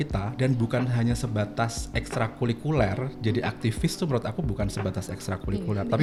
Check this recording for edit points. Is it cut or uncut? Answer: uncut